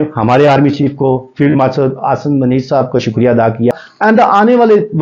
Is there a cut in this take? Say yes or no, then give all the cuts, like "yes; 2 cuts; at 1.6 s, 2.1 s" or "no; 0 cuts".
yes; 1 cut; at 3.8 s